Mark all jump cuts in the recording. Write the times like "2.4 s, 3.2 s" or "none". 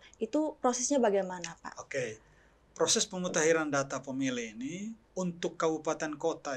5.0 s

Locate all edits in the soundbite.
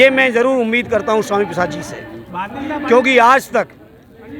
none

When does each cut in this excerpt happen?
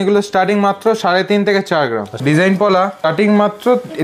2.1 s, 3.0 s

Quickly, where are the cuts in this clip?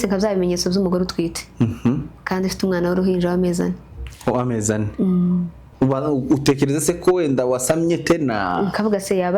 5.6 s

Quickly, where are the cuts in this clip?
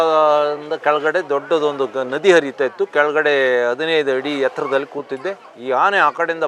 5.5 s

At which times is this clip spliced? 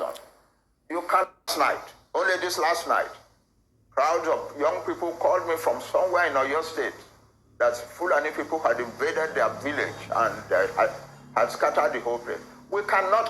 1.5 s

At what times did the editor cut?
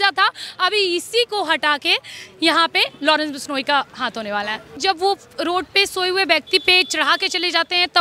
4.8 s

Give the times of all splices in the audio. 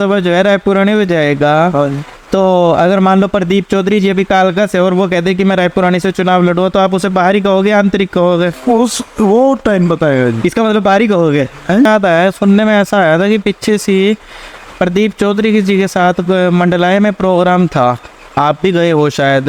11.9 s

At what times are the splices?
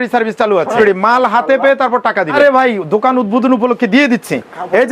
0.8 s, 2.3 s

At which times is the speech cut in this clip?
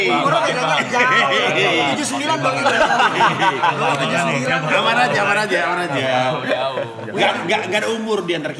none

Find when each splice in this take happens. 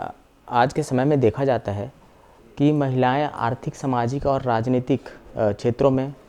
none

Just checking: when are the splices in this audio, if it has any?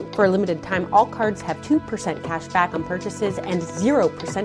none

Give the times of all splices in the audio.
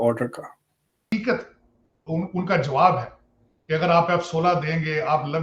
1.1 s

